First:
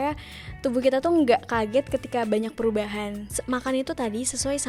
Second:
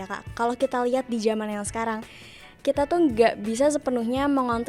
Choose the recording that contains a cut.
first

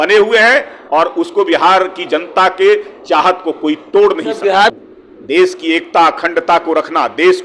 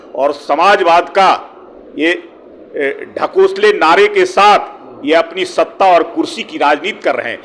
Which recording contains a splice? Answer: first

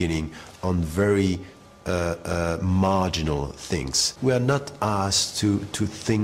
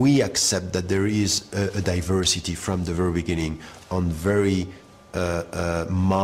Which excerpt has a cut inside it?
first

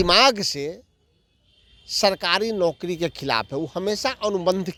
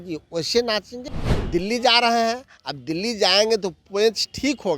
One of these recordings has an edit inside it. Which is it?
second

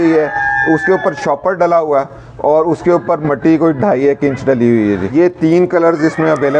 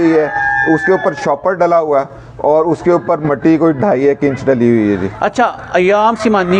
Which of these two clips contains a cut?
first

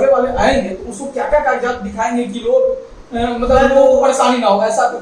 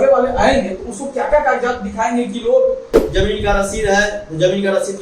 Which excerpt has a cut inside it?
second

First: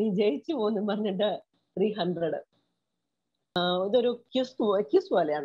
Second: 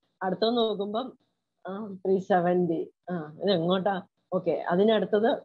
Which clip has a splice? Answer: first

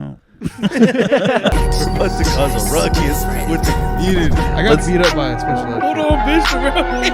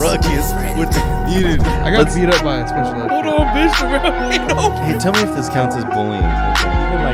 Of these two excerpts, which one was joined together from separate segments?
first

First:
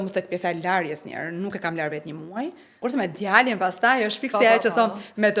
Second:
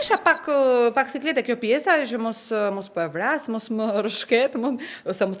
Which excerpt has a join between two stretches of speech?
first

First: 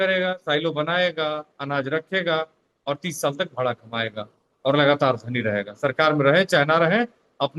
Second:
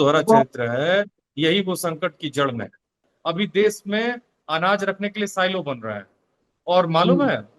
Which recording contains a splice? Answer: second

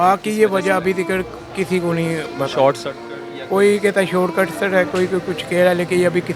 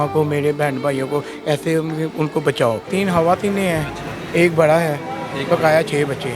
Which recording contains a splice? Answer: second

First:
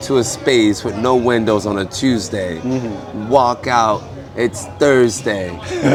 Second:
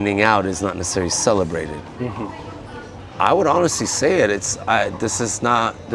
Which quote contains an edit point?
second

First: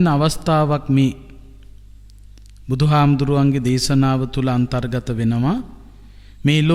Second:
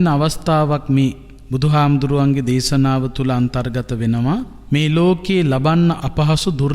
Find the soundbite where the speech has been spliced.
second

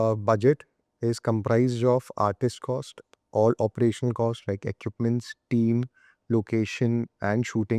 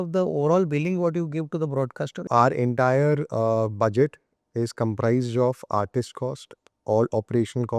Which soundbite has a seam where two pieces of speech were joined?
second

